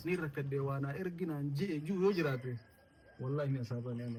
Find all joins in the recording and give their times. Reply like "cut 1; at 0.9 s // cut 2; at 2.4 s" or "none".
none